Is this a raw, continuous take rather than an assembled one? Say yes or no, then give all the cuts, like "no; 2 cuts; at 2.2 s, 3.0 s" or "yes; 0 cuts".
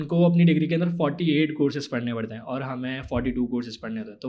yes; 0 cuts